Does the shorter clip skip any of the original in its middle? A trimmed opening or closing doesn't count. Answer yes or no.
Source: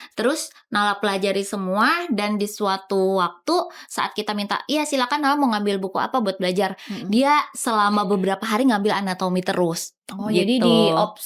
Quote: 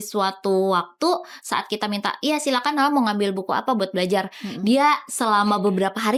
no